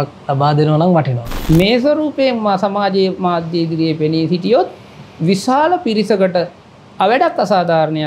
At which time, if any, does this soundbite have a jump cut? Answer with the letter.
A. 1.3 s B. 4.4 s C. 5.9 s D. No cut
A